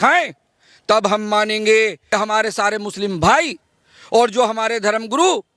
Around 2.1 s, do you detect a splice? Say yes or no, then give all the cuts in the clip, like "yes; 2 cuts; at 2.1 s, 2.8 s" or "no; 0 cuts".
yes; 1 cut; at 2.1 s